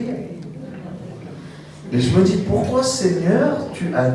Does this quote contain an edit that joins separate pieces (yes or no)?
no